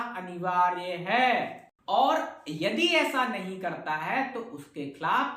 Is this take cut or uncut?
uncut